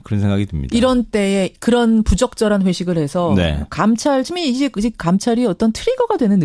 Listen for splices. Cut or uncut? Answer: cut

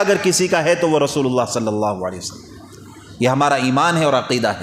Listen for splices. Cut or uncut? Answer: uncut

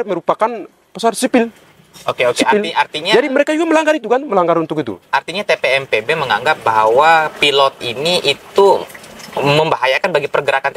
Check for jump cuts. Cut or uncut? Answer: uncut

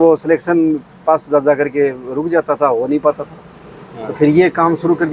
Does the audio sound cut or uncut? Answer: uncut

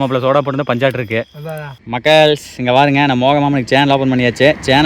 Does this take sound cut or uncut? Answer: cut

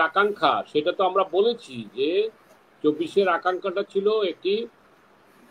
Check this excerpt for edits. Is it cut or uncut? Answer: uncut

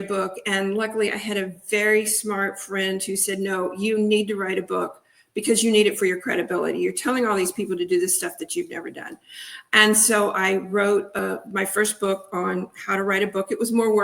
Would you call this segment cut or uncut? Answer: cut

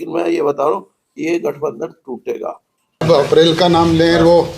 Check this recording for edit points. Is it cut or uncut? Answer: cut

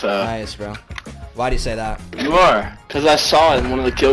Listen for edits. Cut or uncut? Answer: cut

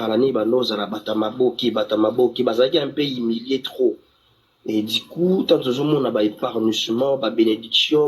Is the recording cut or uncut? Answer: cut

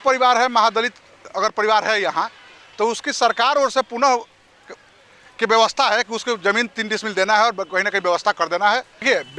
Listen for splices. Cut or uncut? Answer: uncut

